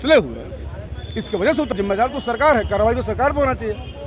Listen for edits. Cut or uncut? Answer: cut